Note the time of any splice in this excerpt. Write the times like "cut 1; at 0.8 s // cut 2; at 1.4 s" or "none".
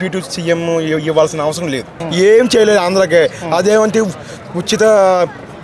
cut 1; at 2.0 s